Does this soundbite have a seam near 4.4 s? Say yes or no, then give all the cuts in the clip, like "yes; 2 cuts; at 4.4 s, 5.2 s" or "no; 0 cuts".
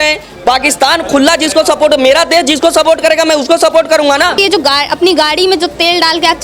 yes; 1 cut; at 4.4 s